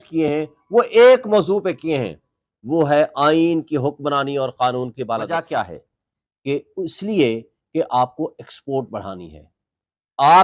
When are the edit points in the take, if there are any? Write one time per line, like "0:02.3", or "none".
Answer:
0:05.4